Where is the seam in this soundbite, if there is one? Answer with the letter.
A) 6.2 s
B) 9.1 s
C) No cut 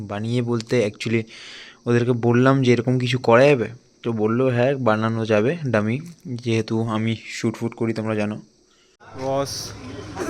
B